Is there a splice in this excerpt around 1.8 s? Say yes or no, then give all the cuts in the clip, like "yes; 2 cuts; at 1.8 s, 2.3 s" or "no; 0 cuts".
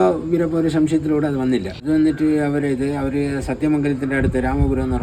yes; 1 cut; at 1.8 s